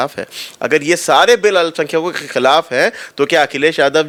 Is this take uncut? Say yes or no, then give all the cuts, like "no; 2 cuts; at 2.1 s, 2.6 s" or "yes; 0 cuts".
yes; 0 cuts